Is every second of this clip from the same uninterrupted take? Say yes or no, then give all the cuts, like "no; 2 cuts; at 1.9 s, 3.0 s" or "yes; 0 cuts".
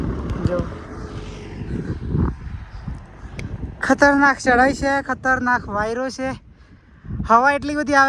yes; 0 cuts